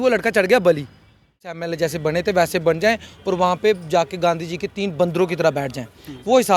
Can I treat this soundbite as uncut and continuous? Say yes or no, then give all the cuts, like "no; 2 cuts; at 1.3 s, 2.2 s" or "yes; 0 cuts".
no; 1 cut; at 1.4 s